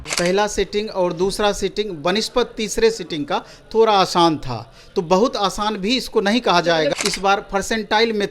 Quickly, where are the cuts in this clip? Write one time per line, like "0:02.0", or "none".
0:06.9